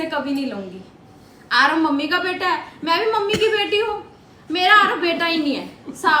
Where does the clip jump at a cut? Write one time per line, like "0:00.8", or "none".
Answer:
none